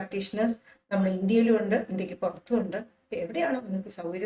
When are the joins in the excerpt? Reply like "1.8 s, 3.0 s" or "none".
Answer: none